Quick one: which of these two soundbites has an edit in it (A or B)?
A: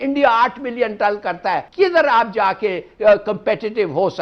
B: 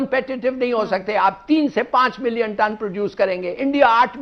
A